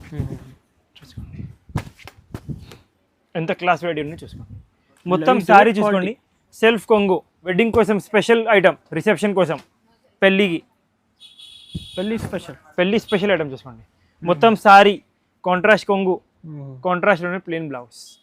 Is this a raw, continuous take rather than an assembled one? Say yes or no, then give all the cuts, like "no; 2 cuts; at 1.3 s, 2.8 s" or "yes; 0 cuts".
no; 1 cut; at 7.5 s